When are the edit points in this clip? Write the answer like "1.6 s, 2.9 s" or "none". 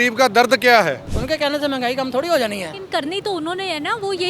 1.1 s